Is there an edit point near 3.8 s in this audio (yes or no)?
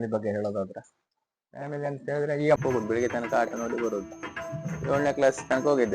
no